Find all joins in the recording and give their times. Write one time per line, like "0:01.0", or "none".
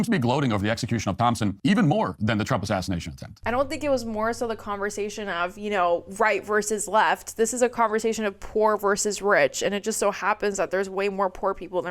none

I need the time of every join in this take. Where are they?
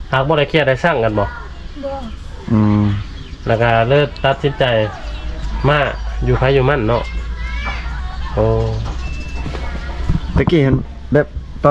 none

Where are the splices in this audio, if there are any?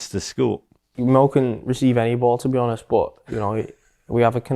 0:00.9

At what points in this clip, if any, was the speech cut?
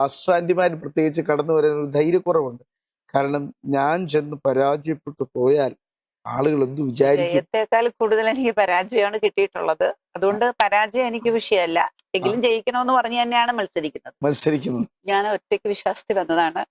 0:15.0

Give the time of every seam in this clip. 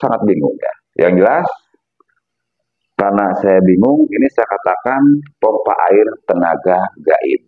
none

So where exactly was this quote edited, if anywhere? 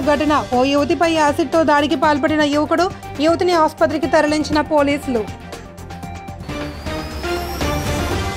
none

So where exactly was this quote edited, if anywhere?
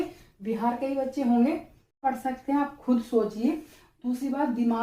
0:02.0

